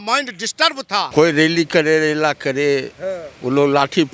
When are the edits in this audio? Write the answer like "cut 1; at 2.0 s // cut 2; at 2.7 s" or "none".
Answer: cut 1; at 1.1 s

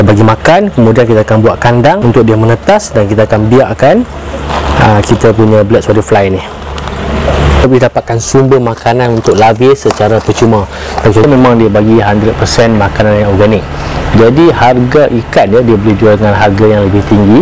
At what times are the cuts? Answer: cut 1; at 7.6 s // cut 2; at 11.2 s

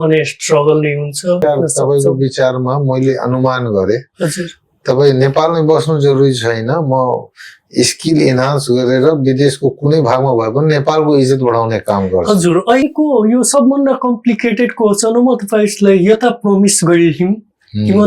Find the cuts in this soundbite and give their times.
cut 1; at 1.4 s // cut 2; at 12.8 s

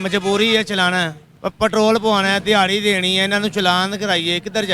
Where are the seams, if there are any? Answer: cut 1; at 1.2 s

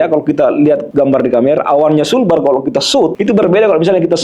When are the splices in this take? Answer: cut 1; at 0.9 s // cut 2; at 3.2 s

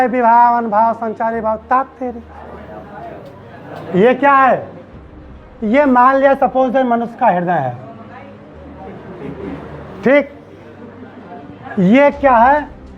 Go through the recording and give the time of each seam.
cut 1; at 2.6 s

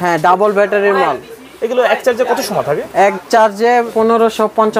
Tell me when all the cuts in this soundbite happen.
cut 1; at 3.9 s

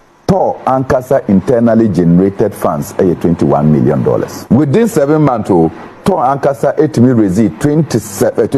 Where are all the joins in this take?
cut 1; at 4.3 s

